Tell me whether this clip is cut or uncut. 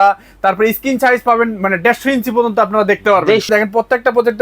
cut